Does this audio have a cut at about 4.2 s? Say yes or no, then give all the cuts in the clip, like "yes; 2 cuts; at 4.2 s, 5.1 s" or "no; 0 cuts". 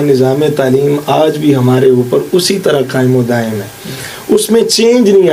no; 0 cuts